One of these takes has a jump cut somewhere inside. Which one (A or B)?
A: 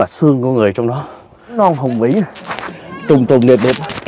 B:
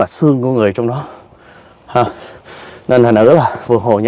A